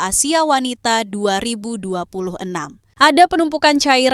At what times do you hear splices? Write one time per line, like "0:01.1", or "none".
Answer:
0:02.8

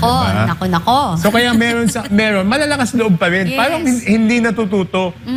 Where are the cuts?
none

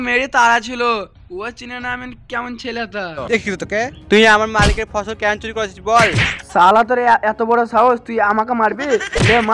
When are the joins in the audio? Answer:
0:03.2
0:06.3

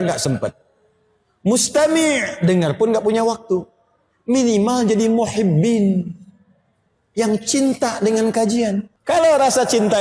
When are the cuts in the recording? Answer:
0:08.9

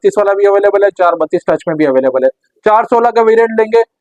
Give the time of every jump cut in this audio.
none

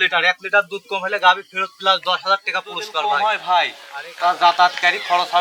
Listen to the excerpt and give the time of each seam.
0:03.0

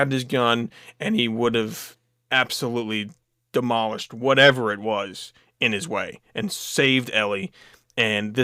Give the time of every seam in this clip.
none

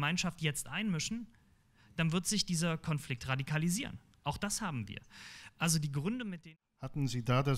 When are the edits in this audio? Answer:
0:06.4

